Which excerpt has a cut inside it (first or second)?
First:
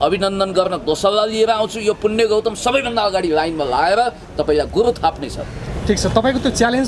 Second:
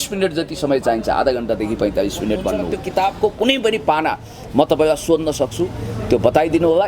second